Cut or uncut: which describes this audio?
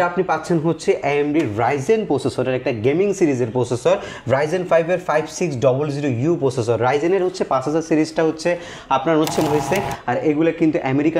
cut